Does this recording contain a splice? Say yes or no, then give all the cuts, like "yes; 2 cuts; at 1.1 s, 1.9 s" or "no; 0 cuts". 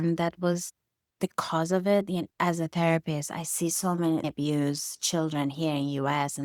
no; 0 cuts